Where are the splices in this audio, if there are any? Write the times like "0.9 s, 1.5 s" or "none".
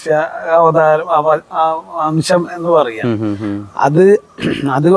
none